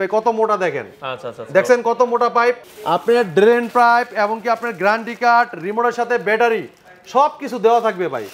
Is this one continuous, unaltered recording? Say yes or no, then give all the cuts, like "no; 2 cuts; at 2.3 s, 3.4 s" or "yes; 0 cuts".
no; 1 cut; at 2.7 s